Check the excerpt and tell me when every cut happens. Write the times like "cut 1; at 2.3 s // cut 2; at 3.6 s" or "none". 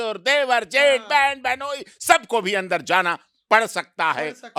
none